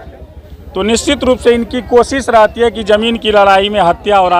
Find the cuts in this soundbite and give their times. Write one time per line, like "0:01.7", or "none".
none